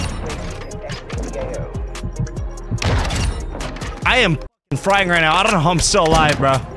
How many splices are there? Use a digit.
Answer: 1